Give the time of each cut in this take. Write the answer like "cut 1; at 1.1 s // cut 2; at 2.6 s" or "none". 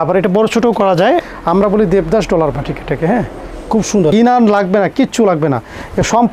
cut 1; at 1.2 s // cut 2; at 4.1 s